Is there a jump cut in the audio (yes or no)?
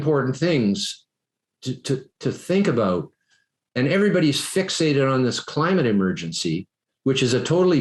no